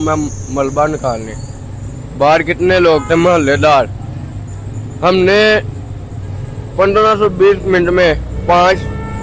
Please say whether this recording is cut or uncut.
uncut